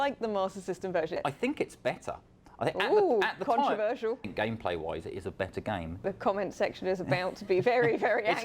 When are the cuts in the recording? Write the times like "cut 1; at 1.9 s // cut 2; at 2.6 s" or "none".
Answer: cut 1; at 1.2 s // cut 2; at 4.3 s // cut 3; at 6.0 s

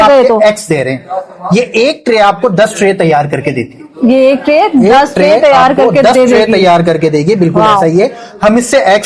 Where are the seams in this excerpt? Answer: none

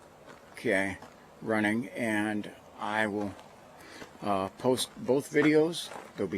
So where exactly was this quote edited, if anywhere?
cut 1; at 4.2 s

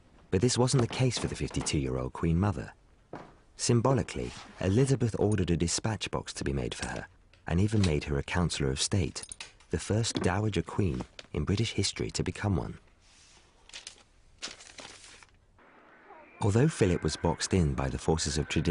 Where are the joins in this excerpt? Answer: cut 1; at 13.8 s

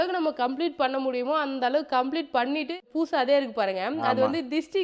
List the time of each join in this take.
cut 1; at 2.8 s

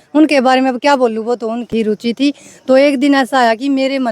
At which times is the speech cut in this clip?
cut 1; at 1.7 s

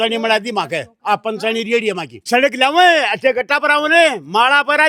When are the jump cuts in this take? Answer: cut 1; at 2.2 s

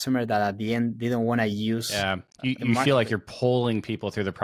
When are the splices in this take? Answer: none

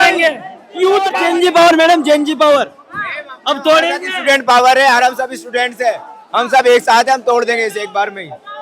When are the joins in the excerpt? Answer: cut 1; at 1.1 s

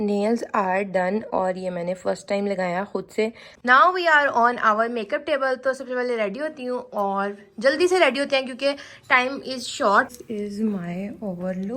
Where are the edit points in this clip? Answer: cut 1; at 3.5 s // cut 2; at 10.2 s

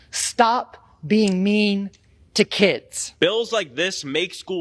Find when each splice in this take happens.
cut 1; at 3.0 s

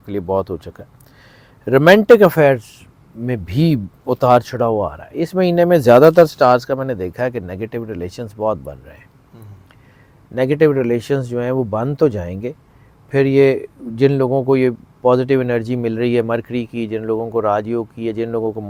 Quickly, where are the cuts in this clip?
none

